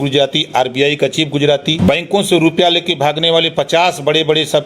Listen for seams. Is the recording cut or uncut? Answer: cut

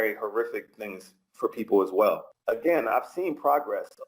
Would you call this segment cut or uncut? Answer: cut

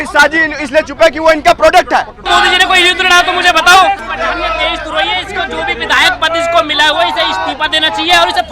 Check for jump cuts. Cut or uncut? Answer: cut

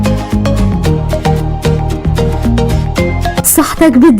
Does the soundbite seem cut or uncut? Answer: cut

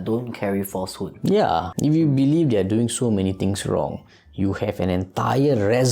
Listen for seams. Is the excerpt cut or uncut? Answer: cut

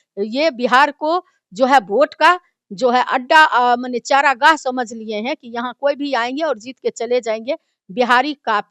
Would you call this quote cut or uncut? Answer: uncut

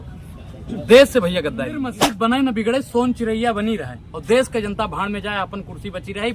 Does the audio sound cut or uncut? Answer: cut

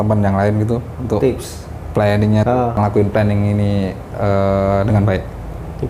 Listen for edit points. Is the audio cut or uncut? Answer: cut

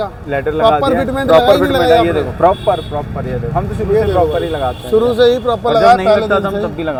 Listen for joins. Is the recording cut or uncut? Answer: uncut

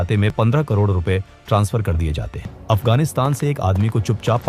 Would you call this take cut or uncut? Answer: cut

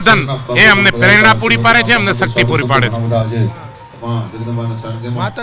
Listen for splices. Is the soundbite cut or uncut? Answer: uncut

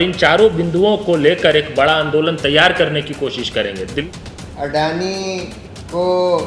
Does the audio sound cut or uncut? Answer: cut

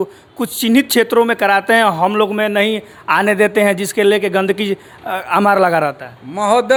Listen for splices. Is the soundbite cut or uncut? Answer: uncut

